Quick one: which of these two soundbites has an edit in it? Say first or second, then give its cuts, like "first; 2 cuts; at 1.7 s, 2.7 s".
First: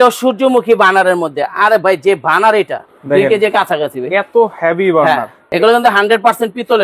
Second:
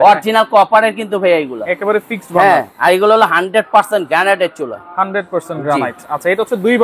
first; 2 cuts; at 2.9 s, 5.4 s